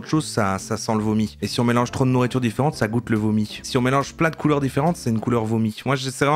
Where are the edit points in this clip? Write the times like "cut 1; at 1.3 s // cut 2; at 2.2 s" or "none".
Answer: none